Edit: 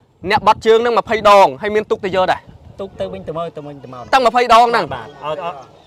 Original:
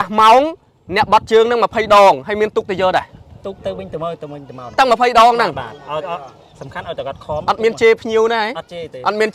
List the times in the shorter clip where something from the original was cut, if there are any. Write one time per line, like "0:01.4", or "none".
none